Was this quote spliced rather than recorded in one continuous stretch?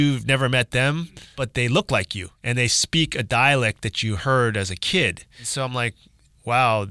yes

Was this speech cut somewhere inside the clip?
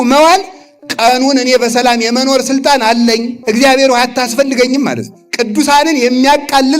yes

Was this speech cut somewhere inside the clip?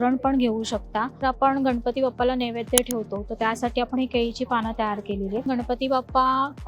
yes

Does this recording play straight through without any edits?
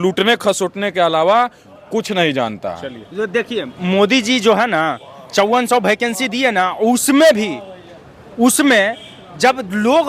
yes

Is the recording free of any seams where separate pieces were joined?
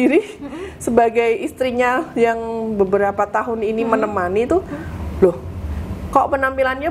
yes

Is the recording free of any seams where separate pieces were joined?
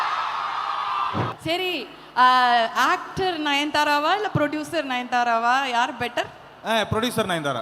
no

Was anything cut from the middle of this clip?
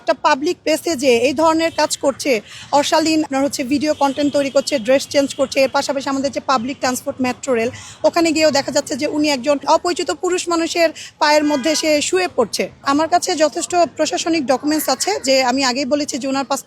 yes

